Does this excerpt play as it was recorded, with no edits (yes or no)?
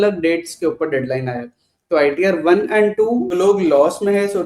no